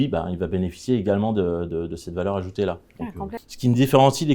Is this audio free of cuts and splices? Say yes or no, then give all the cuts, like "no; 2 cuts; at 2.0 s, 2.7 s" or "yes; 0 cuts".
no; 1 cut; at 3.4 s